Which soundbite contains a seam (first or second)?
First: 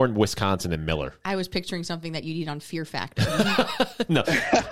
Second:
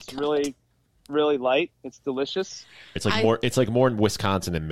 second